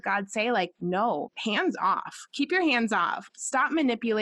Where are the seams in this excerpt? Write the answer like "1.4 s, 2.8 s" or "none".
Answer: 1.1 s, 3.2 s